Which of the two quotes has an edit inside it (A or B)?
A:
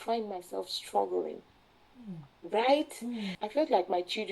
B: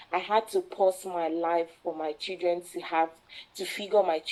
A